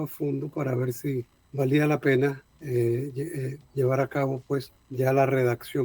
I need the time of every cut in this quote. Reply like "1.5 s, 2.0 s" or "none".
1.4 s, 2.5 s, 4.8 s